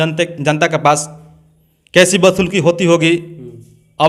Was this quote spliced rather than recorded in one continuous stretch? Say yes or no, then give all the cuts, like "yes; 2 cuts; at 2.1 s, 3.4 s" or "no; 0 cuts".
no; 0 cuts